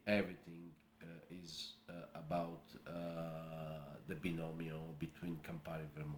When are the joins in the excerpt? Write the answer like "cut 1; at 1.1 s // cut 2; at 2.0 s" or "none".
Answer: none

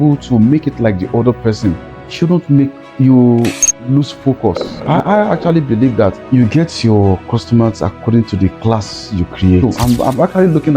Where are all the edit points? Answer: cut 1; at 4.7 s // cut 2; at 6.2 s // cut 3; at 9.8 s

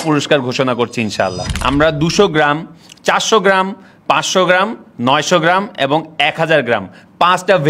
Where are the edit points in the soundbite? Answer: cut 1; at 1.5 s

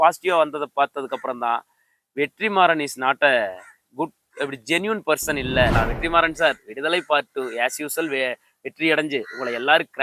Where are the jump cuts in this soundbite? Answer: cut 1; at 5.7 s

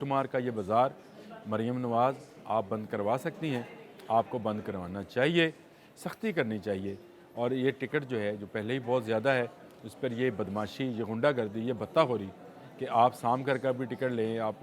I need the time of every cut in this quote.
none

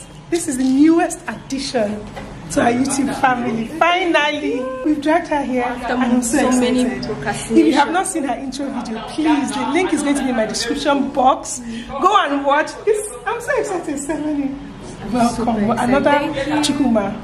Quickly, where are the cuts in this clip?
cut 1; at 4.8 s

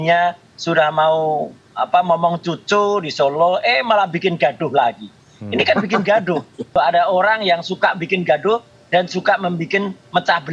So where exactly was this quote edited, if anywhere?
cut 1; at 6.7 s

